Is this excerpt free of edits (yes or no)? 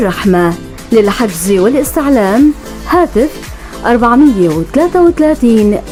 yes